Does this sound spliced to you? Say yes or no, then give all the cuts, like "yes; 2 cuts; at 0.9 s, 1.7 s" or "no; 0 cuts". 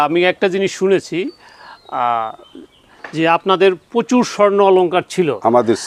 no; 0 cuts